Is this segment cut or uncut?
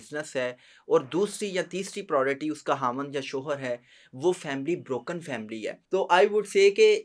cut